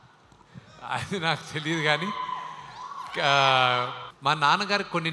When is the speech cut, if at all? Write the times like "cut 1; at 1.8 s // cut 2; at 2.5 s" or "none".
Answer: cut 1; at 4.0 s